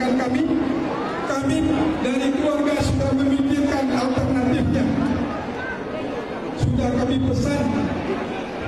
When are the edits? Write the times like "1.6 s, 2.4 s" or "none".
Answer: 1.0 s

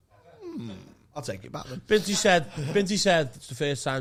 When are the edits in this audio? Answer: none

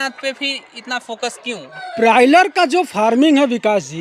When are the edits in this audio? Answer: 1.8 s

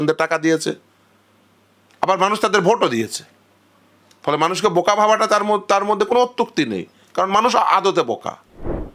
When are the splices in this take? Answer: none

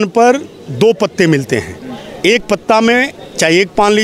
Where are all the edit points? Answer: none

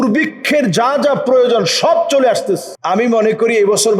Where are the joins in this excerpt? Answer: 2.7 s

